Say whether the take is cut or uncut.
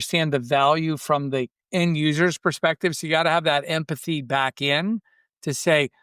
cut